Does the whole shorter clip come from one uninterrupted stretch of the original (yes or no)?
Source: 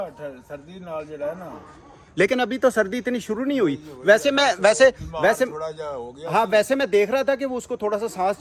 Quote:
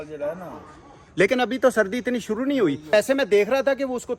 no